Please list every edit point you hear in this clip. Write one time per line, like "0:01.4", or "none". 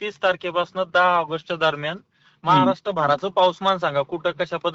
none